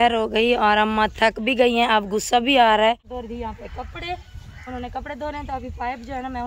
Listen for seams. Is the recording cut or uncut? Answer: cut